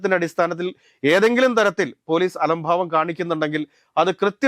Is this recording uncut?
yes; 0 cuts

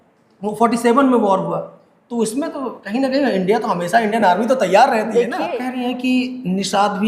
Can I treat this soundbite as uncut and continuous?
no; 1 cut; at 5.7 s

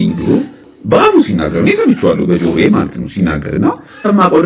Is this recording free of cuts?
yes; 0 cuts

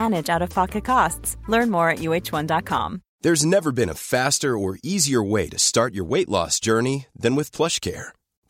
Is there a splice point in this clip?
yes; 1 cut; at 3.0 s

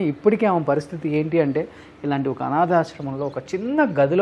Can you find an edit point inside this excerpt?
no; 0 cuts

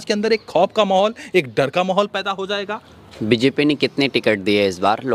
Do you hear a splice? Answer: no; 0 cuts

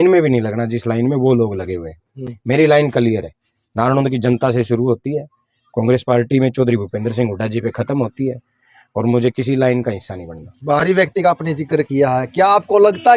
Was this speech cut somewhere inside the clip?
no; 0 cuts

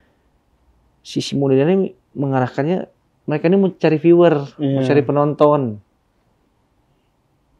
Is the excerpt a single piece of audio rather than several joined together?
yes; 0 cuts

